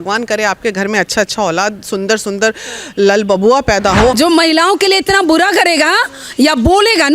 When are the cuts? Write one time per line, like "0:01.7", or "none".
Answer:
0:04.1